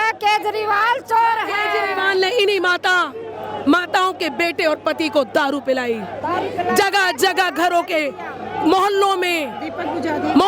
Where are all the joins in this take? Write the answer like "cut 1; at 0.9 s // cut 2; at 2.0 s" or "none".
none